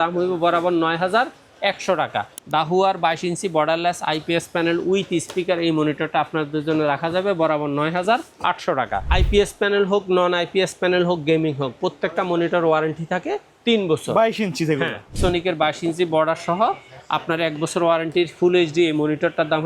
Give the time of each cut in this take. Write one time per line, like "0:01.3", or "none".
0:02.4
0:09.0
0:15.1